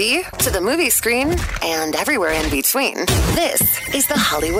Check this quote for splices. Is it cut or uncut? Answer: uncut